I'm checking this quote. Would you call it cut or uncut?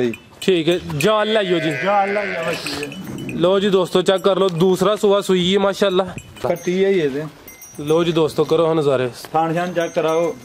cut